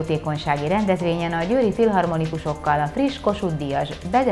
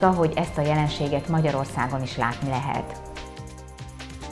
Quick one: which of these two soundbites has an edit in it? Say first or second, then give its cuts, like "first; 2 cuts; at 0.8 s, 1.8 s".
second; 1 cut; at 2.8 s